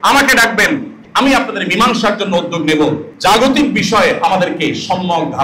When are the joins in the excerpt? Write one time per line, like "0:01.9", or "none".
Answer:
0:01.0
0:03.0